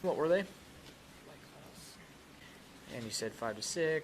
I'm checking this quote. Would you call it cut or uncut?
cut